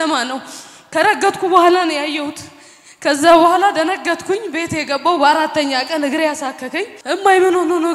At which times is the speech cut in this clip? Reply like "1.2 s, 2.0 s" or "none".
6.9 s